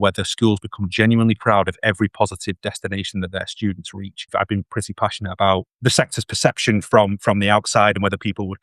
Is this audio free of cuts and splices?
no; 2 cuts; at 4.3 s, 5.7 s

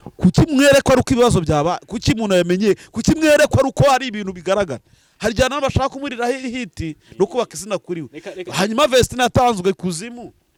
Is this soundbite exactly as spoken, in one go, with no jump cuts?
yes; 0 cuts

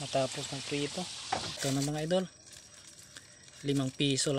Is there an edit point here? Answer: yes; 1 cut; at 1.6 s

